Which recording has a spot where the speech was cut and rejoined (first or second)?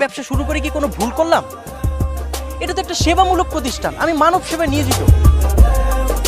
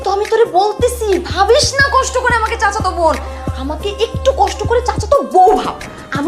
first